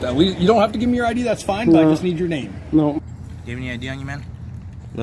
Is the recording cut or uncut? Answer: cut